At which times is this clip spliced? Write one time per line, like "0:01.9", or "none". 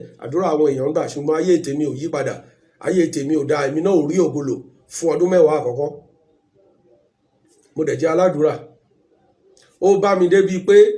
none